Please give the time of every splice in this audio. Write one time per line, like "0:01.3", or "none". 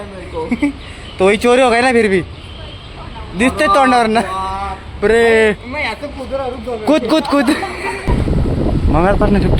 0:08.1

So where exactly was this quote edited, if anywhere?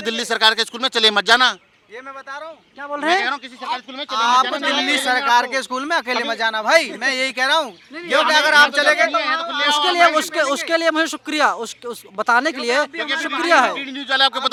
none

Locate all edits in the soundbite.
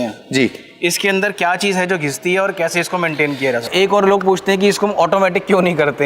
0:03.6

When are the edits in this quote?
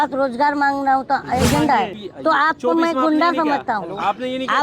0:02.0

